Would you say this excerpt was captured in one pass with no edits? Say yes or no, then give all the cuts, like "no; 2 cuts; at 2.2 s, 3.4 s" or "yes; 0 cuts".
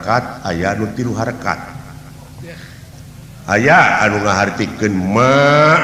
yes; 0 cuts